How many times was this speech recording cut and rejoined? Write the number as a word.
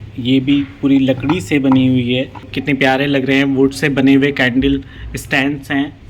one